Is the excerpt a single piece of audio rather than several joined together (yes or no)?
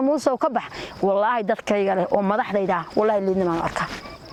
yes